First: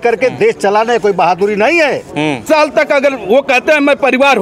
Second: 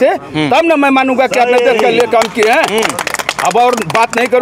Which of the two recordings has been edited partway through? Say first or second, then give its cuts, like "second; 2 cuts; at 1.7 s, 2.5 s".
first; 1 cut; at 2.4 s